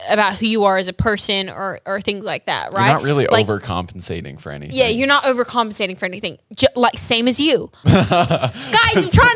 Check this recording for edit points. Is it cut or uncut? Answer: cut